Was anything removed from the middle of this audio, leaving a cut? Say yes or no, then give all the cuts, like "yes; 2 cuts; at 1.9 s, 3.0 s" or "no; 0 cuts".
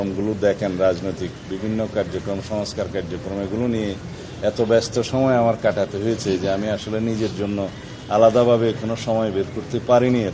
no; 0 cuts